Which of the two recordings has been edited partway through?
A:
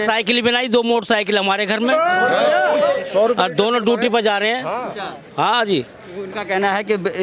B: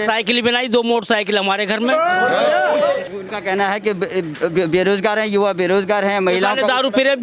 B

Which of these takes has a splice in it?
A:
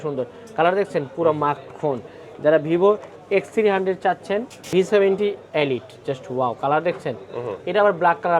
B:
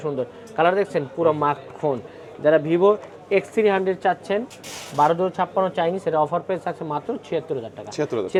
A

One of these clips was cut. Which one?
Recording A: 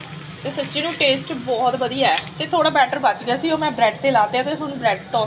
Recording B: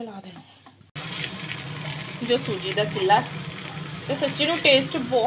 B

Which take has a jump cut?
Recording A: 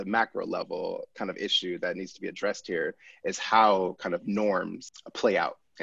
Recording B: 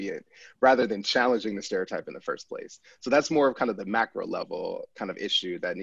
A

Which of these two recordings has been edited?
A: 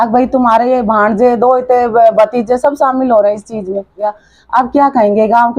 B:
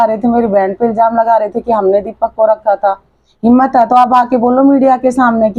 A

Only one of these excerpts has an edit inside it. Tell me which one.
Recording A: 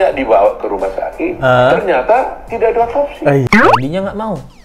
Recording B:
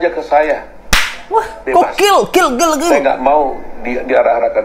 A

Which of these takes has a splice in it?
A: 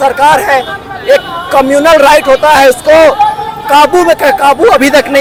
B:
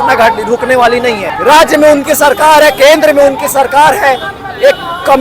B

